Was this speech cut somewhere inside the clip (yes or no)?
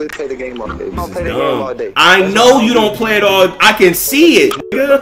yes